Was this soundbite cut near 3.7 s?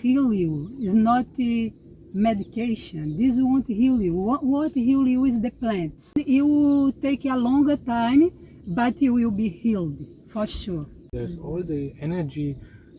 no; 2 cuts; at 6.2 s, 11.1 s

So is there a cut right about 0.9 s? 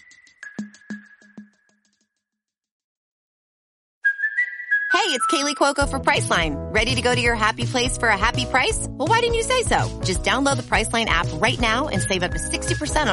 no; 0 cuts

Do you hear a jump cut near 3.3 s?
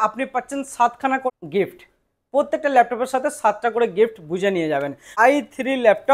no; 2 cuts; at 1.3 s, 5.1 s

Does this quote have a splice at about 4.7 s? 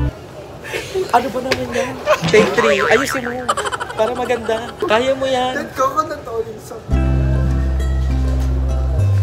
yes; 2 cuts; at 4.7 s, 6.5 s

